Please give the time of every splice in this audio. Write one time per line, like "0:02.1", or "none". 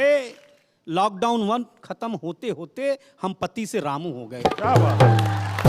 none